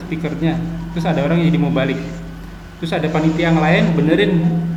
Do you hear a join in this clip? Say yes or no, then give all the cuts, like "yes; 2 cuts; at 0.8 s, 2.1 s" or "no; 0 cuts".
no; 0 cuts